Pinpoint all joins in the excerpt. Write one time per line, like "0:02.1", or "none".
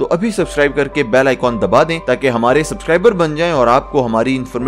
none